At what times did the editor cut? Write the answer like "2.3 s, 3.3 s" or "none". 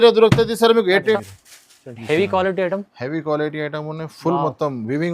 1.1 s